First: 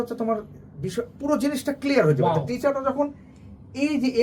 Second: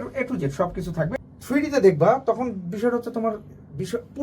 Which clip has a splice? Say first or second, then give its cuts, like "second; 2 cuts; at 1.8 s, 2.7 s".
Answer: second; 1 cut; at 1.1 s